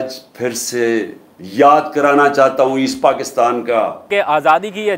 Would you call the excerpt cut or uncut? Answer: cut